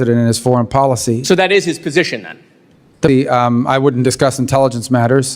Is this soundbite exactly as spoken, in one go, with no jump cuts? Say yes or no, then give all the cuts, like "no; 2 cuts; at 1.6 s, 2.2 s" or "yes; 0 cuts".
no; 1 cut; at 3.1 s